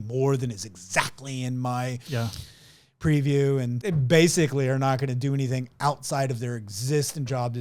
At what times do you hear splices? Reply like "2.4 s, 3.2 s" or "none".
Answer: 3.8 s

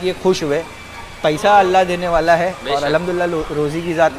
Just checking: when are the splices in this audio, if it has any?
none

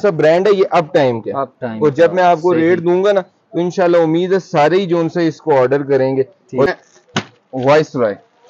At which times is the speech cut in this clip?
6.7 s

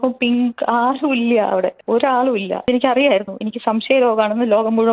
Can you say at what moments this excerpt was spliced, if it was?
2.6 s

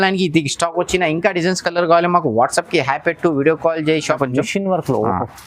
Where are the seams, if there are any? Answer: 4.2 s

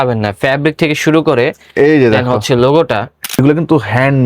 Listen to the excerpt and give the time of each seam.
3.3 s

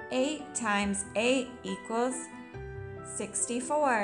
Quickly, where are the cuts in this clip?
none

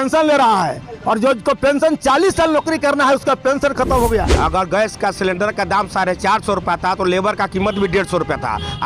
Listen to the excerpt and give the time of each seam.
4.3 s

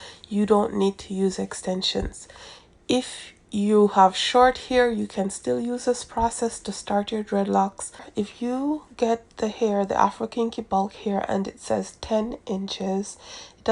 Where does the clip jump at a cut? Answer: 8.1 s

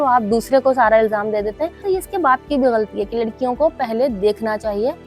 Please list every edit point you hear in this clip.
1.8 s

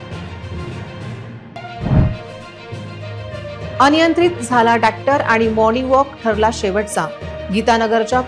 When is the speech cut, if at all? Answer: none

